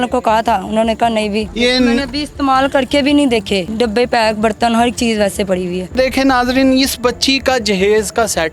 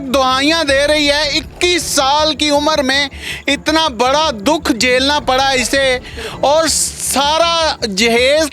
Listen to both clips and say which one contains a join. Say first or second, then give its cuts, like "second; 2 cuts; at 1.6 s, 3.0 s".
first; 3 cuts; at 1.5 s, 3.7 s, 5.9 s